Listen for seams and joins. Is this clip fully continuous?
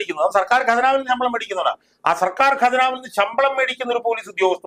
yes; 0 cuts

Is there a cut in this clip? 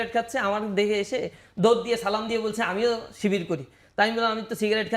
no; 0 cuts

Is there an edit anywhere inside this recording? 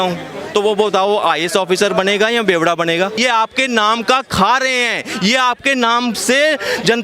yes; 1 cut; at 3.2 s

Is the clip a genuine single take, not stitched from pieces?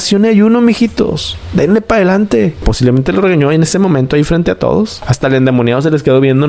yes; 0 cuts

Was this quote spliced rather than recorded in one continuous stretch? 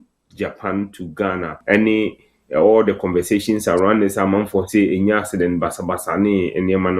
yes; 1 cut; at 1.6 s

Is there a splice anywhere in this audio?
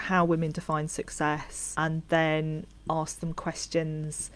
yes; 2 cuts; at 1.6 s, 2.7 s

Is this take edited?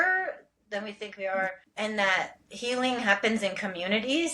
yes; 1 cut; at 1.6 s

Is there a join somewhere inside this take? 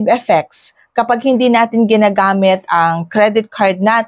no; 0 cuts

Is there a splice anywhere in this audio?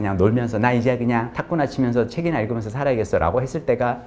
yes; 1 cut; at 1.4 s

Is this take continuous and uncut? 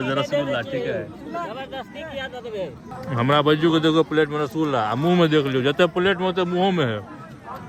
yes; 0 cuts

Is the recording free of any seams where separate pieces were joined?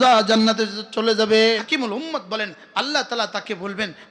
no; 1 cut; at 1.6 s

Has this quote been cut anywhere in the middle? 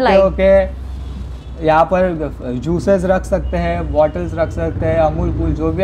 no; 0 cuts

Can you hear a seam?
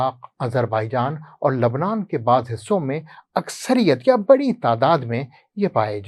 no; 0 cuts

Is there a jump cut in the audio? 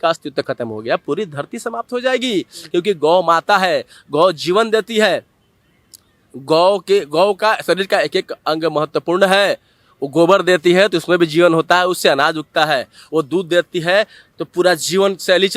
no; 0 cuts

